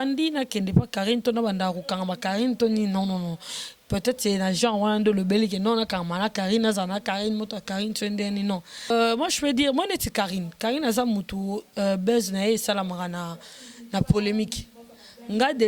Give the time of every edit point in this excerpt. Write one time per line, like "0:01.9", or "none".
0:08.9